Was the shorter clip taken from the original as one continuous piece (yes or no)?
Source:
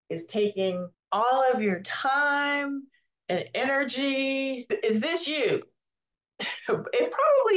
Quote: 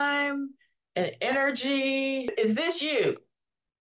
no